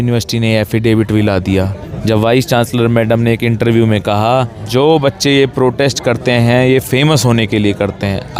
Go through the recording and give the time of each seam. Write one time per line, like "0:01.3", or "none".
0:01.8
0:04.6